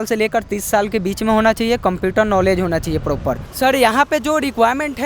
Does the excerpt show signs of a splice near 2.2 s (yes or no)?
no